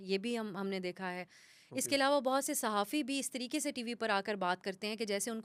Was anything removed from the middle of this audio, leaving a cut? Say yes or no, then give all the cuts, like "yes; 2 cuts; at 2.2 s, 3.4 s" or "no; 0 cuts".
no; 0 cuts